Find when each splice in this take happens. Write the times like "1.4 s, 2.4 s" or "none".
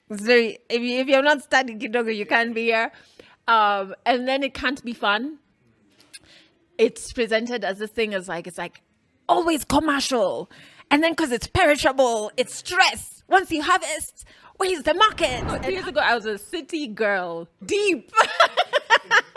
15.6 s, 17.5 s